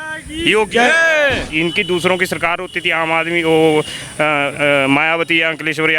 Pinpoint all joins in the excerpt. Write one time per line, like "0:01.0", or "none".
0:01.4